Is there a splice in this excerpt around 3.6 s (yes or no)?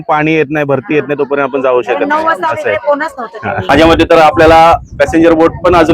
yes